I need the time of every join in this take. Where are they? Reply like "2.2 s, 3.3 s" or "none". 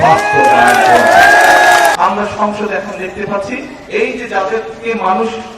2.0 s